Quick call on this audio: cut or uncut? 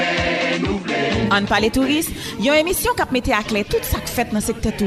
cut